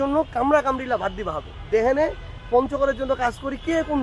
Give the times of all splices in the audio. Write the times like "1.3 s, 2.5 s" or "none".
none